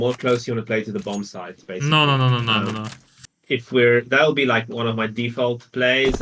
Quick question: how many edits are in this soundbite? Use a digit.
1